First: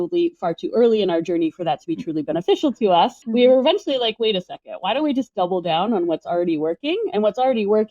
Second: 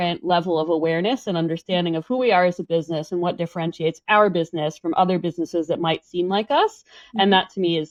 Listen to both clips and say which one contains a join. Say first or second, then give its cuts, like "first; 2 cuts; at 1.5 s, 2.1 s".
first; 1 cut; at 3.2 s